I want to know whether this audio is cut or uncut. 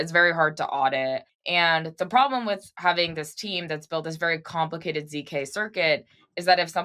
cut